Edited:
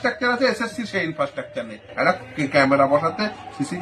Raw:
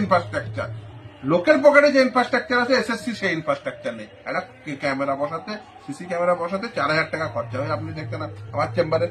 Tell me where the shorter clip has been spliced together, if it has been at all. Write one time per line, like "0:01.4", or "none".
none